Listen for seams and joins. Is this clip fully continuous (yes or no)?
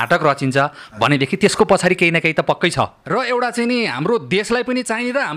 no